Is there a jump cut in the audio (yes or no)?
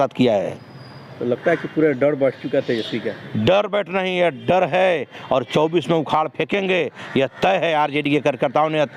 no